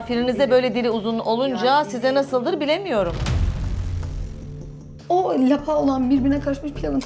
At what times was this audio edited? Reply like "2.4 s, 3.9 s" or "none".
4.8 s